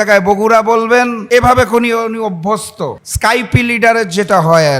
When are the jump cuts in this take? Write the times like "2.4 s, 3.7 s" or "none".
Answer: 1.2 s, 3.0 s

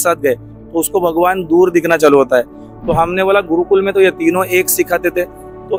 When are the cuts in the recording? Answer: none

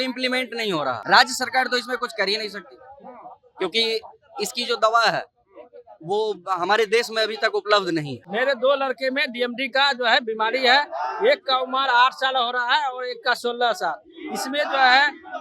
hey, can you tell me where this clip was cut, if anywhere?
1.0 s, 8.2 s

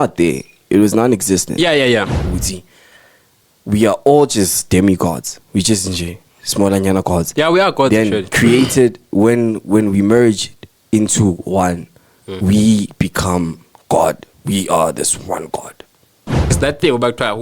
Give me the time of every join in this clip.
2.2 s, 16.5 s

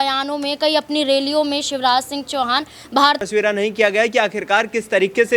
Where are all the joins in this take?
3.2 s

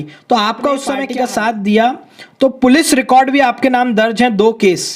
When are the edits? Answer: 1.0 s

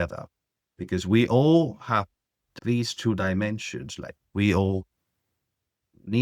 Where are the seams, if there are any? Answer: 2.4 s

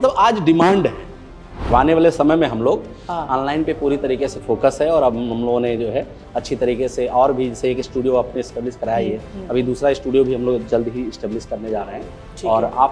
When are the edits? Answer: 1.7 s

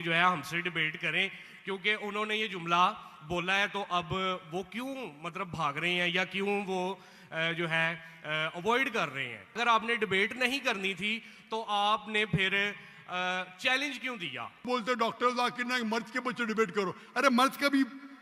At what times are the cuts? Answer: 9.6 s, 14.6 s

